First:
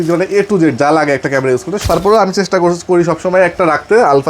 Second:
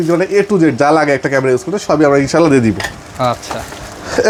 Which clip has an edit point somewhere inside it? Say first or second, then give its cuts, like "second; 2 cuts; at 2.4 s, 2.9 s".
first; 1 cut; at 1.9 s